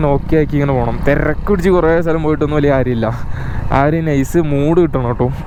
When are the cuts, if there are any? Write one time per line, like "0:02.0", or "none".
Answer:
none